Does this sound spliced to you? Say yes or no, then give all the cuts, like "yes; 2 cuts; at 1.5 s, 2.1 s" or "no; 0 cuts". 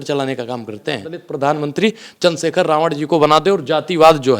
yes; 1 cut; at 1.2 s